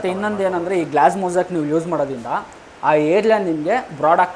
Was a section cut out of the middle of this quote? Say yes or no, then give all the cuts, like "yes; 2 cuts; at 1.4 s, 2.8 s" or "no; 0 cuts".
no; 0 cuts